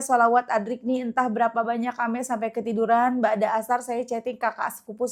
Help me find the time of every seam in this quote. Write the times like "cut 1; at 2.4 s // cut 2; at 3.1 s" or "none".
none